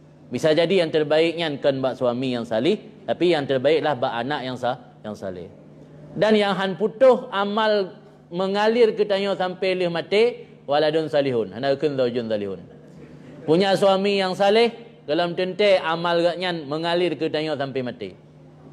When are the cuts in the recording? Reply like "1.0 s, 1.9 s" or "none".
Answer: none